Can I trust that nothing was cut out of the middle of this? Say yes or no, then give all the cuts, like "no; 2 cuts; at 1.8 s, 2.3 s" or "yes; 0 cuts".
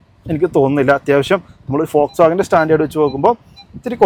yes; 0 cuts